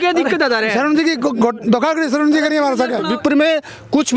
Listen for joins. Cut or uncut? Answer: cut